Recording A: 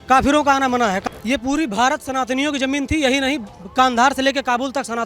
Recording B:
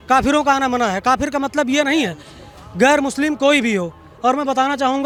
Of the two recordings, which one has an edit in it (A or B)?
A